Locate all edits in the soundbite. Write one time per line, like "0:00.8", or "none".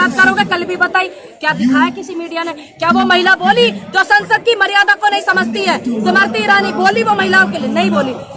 none